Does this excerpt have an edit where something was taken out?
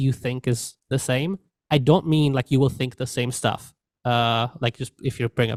no; 0 cuts

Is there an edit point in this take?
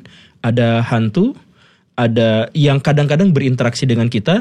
no; 0 cuts

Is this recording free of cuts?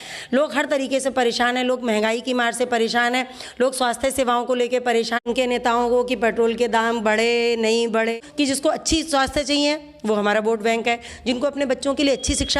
no; 2 cuts; at 5.2 s, 8.1 s

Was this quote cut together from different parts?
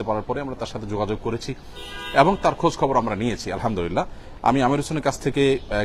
no; 0 cuts

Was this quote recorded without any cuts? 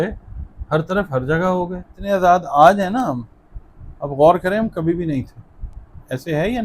no; 1 cut; at 1.9 s

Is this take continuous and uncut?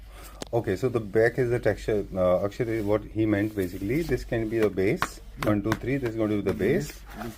yes; 0 cuts

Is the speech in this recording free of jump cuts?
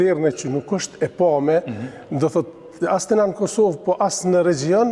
yes; 0 cuts

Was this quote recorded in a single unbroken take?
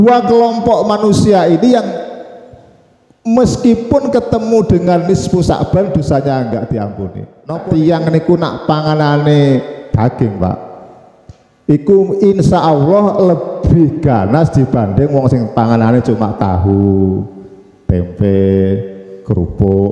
no; 1 cut; at 7.5 s

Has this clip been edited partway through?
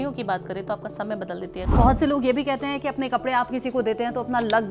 yes; 1 cut; at 1.7 s

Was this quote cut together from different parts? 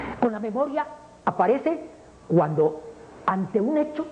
no; 0 cuts

